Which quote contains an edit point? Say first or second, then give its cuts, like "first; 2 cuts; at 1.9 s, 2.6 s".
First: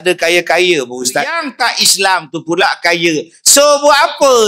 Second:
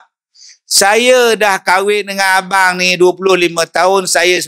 first; 1 cut; at 1.5 s